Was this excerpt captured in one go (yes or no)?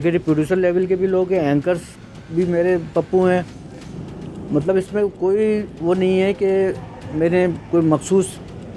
yes